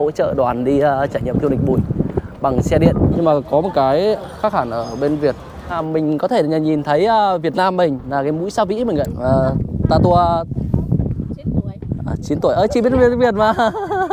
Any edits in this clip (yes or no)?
yes